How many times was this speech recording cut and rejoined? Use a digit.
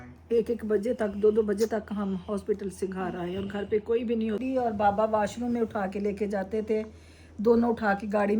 1